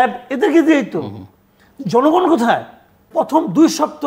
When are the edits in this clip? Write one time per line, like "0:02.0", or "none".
0:03.0